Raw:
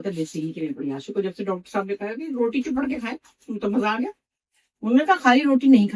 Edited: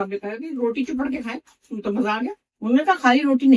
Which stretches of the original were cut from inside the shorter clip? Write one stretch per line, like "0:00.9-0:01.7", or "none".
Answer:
0:04.2-0:04.7